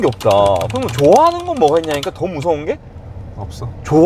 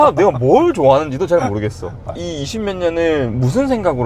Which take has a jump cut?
second; 1 cut; at 2.2 s

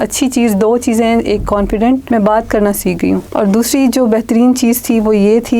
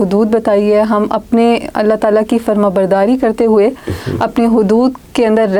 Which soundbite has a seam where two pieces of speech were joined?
first; 2 cuts; at 2.0 s, 3.3 s

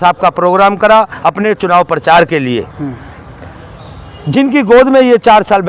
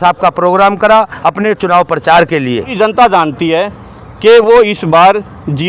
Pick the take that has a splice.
second; 1 cut; at 2.7 s

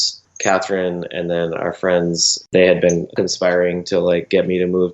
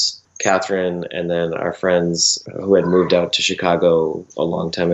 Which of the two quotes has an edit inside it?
first; 2 cuts; at 2.4 s, 3.1 s

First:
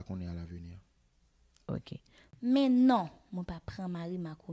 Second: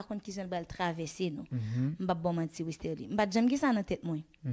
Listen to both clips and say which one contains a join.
first; 1 cut; at 2.3 s

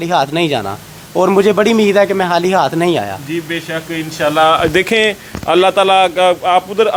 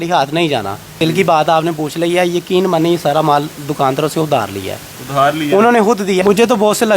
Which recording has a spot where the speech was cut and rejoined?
second; 2 cuts; at 1.0 s, 6.2 s

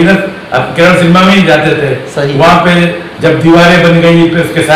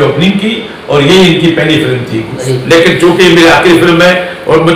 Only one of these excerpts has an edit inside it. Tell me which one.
second; 1 cut; at 2.5 s

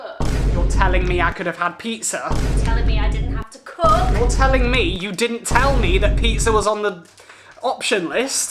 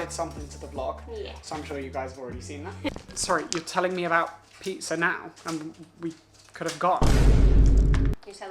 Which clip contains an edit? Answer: second; 1 cut; at 3.0 s

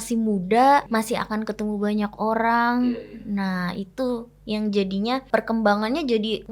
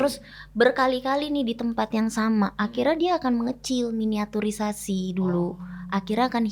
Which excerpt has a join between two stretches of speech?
first; 2 cuts; at 0.9 s, 5.2 s

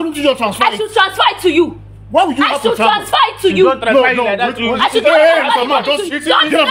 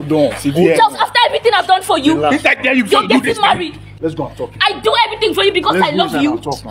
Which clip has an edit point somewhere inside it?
second; 1 cut; at 3.9 s

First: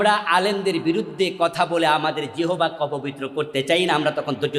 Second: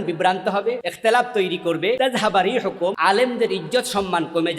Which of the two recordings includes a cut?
second; 3 cuts; at 0.9 s, 2.0 s, 3.0 s

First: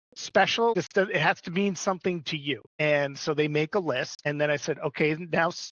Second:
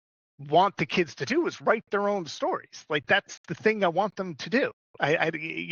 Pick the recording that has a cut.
first; 3 cuts; at 0.7 s, 2.8 s, 4.1 s

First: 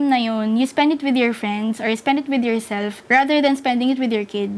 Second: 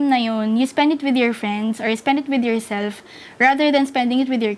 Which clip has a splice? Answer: first; 1 cut; at 3.0 s

